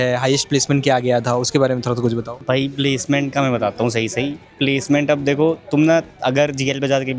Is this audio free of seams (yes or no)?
yes